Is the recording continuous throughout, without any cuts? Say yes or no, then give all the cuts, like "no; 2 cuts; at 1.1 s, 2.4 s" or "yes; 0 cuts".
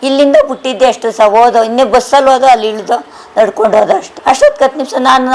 no; 1 cut; at 4.1 s